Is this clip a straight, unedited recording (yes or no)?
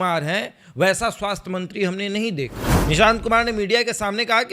no